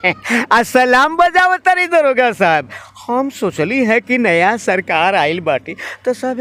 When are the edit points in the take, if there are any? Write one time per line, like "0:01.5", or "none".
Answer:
none